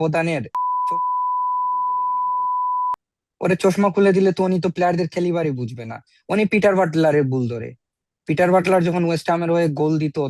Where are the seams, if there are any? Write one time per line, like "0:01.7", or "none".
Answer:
none